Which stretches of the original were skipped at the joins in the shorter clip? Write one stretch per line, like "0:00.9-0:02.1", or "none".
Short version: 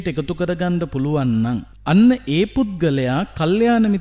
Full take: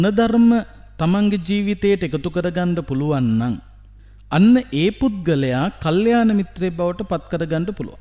0:03.7-0:04.2